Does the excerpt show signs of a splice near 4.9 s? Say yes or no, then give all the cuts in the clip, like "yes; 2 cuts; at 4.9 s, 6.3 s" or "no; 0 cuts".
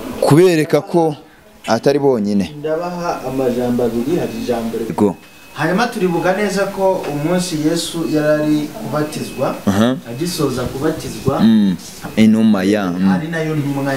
yes; 2 cuts; at 4.9 s, 12.0 s